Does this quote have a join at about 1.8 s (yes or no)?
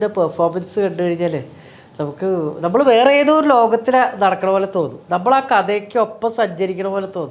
no